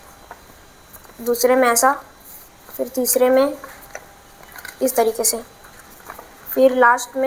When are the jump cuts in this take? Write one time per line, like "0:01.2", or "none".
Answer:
none